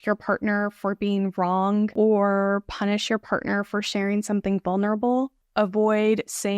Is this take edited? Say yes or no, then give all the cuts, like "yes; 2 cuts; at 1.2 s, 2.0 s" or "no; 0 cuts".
yes; 2 cuts; at 1.9 s, 5.4 s